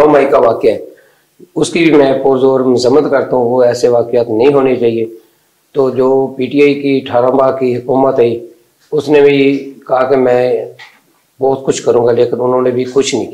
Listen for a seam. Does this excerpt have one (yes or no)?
no